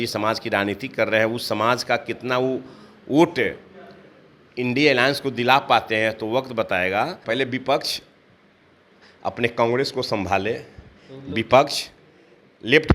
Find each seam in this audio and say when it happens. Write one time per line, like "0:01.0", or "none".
0:07.2